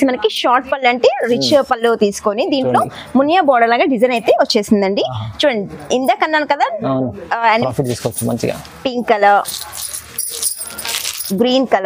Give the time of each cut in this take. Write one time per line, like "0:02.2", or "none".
0:07.6